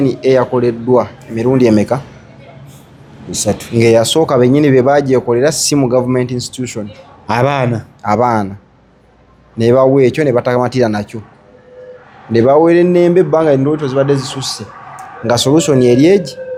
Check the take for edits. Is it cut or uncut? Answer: uncut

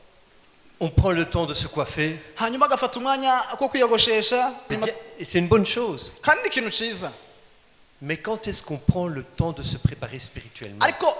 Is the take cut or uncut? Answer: cut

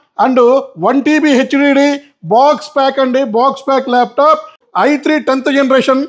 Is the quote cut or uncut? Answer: cut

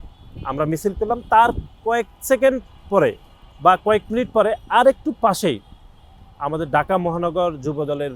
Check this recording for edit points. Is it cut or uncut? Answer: uncut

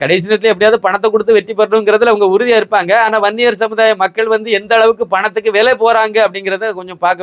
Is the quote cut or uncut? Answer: uncut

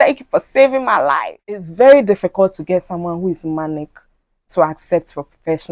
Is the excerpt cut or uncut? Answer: cut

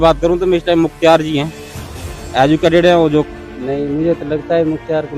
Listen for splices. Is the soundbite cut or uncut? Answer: cut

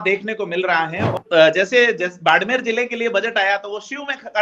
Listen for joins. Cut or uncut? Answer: cut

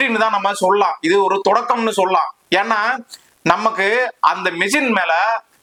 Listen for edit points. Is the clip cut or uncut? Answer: uncut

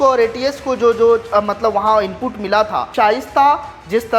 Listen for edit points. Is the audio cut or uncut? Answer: cut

